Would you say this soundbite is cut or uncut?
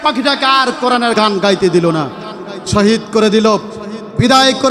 cut